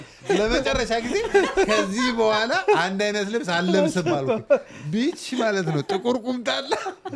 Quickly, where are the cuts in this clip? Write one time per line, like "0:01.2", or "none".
none

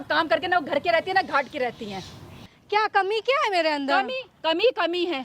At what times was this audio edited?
0:02.6

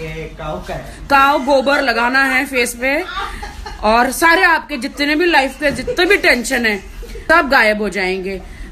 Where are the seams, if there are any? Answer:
0:07.1

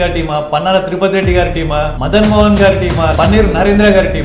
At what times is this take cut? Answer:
0:02.0
0:03.1

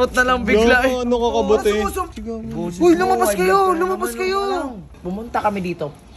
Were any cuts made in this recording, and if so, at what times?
0:02.1
0:05.0

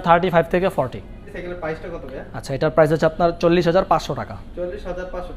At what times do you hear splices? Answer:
0:01.3

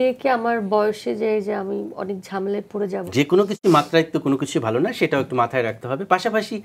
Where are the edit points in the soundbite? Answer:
0:03.0

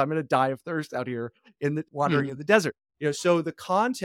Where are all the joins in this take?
none

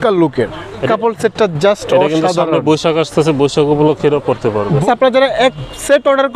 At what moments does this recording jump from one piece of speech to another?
0:00.8
0:04.8

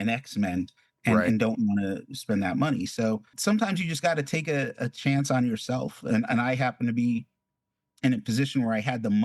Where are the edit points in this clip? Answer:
0:03.3

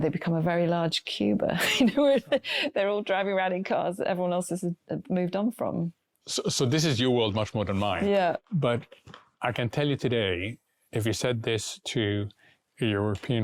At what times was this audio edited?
none

